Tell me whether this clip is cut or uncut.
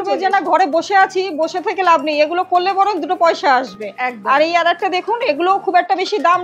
uncut